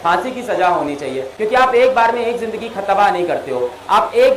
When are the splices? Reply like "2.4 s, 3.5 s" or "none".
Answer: 1.3 s